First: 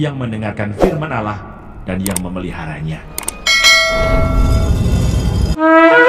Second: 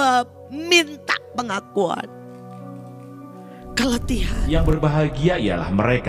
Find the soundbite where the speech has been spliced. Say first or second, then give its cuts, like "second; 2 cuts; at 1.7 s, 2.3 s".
second; 1 cut; at 4.4 s